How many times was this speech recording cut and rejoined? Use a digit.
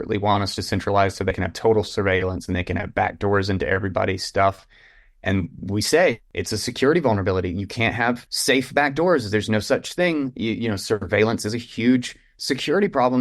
3